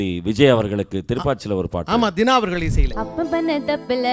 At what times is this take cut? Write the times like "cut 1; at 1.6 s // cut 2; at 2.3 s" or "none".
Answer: cut 1; at 2.8 s